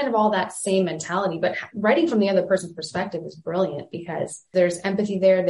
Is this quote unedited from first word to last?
no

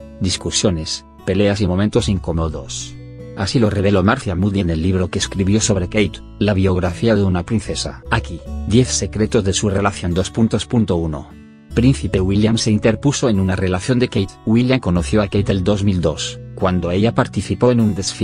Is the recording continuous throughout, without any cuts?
no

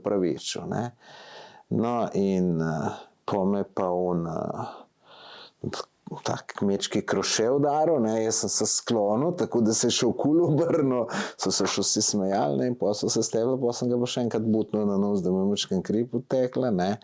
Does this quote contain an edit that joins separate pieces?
no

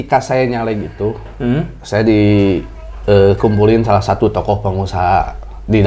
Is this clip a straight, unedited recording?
yes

